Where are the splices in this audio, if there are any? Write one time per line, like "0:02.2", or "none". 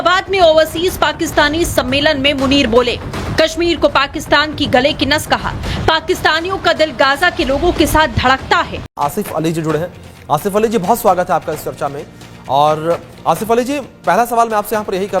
0:08.9

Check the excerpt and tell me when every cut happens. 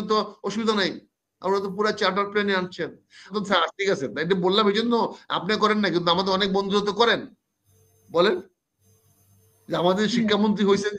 0:03.3

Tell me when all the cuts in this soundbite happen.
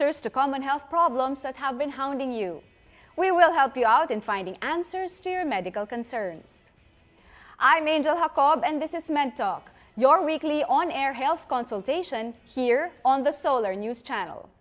none

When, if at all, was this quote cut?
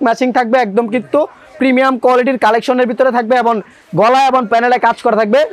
none

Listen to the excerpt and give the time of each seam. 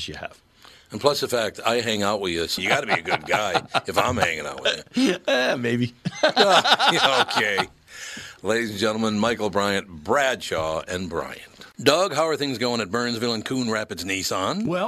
0:11.7

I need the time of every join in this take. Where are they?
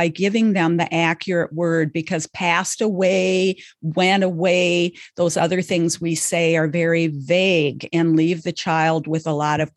none

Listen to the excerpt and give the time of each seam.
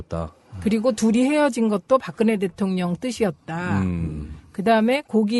0:01.2

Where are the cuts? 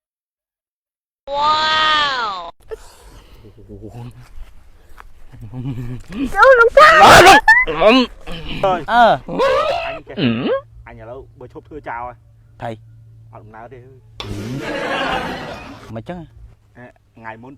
0:08.6
0:09.3
0:10.8

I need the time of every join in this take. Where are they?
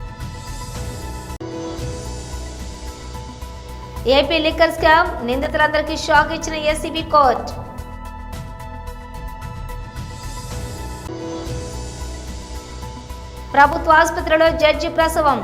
0:01.0

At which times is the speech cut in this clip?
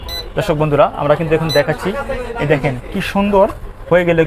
none

